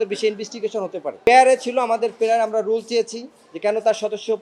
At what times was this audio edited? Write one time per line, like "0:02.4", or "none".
0:01.3